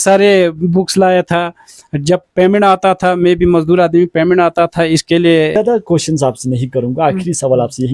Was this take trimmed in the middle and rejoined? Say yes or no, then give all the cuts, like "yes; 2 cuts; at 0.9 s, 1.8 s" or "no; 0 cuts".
yes; 1 cut; at 5.6 s